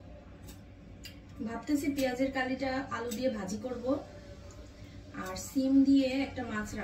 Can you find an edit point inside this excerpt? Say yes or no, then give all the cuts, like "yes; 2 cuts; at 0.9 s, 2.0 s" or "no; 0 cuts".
no; 0 cuts